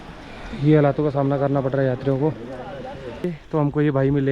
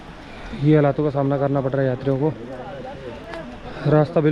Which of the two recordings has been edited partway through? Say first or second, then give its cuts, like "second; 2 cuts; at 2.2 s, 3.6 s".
first; 1 cut; at 3.3 s